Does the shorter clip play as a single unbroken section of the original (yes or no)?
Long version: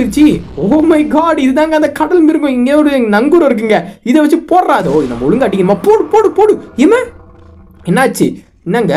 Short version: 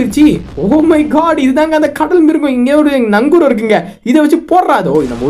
yes